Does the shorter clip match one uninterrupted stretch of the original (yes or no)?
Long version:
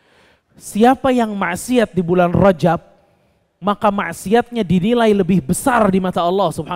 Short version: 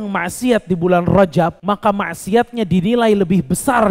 no